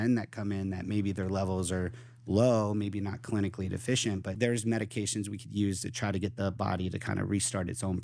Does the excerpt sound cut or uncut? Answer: cut